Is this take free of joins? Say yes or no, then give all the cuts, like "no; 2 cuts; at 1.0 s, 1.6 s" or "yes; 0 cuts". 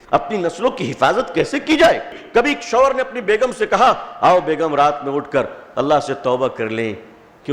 no; 1 cut; at 2.2 s